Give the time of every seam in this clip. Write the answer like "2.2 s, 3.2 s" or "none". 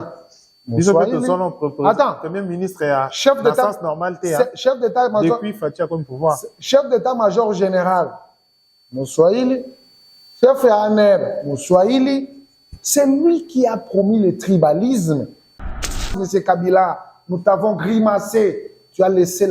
15.7 s